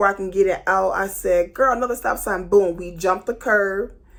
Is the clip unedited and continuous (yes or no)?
yes